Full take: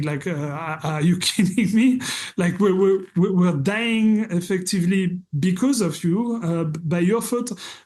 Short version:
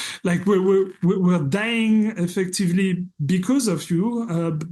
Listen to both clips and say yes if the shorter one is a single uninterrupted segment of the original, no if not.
yes